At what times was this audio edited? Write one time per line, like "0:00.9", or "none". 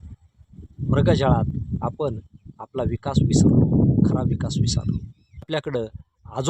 0:05.5